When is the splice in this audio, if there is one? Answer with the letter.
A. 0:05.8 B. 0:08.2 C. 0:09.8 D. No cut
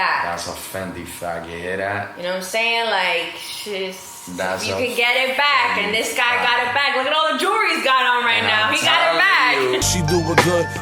C